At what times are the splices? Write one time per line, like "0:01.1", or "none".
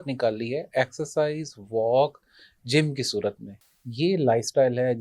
0:03.5

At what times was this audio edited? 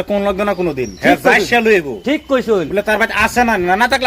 none

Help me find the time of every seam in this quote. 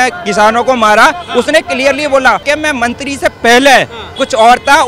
none

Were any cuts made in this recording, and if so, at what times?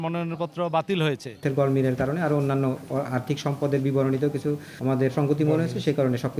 0:01.4
0:05.0

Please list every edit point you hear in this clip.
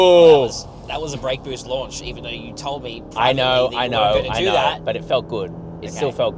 none

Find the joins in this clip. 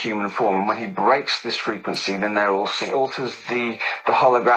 none

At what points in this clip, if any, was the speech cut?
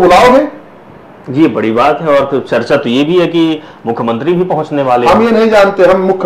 none

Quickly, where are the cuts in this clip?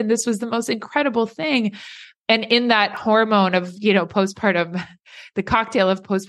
none

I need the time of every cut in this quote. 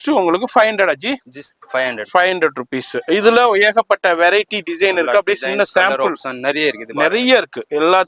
none

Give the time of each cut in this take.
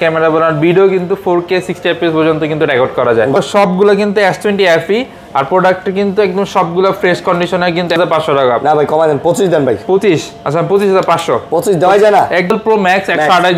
0:03.4
0:08.0
0:12.5

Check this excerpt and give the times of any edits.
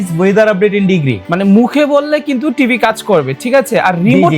0:01.2

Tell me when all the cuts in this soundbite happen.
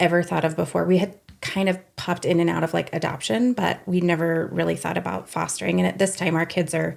none

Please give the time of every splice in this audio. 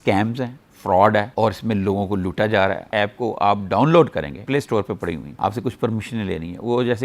0:02.9
0:05.3

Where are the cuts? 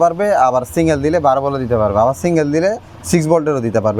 none

